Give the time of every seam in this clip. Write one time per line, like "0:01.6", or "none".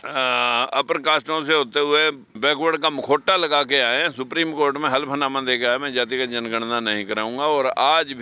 0:02.3

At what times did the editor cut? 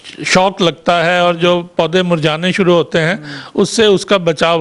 none

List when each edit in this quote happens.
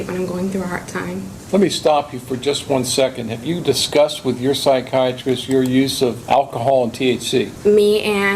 0:01.4
0:06.2
0:07.5

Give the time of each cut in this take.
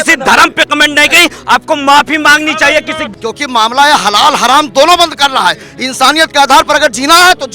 0:03.0

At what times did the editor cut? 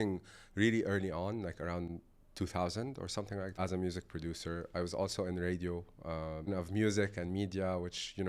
0:03.6
0:06.5

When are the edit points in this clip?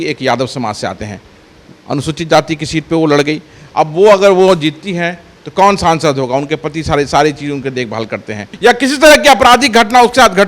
0:08.5

